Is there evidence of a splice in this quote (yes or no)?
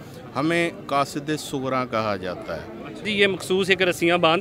yes